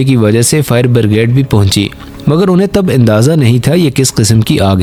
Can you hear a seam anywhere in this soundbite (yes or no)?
no